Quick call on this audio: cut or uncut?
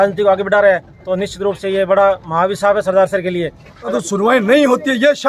cut